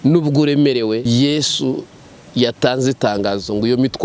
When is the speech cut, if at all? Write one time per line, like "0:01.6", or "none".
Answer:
0:01.0